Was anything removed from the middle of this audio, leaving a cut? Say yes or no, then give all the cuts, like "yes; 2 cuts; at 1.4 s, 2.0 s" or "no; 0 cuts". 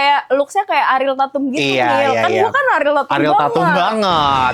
no; 0 cuts